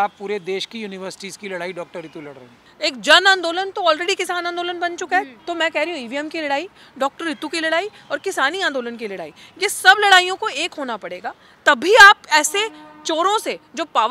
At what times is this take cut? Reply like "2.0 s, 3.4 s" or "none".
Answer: 2.6 s, 5.3 s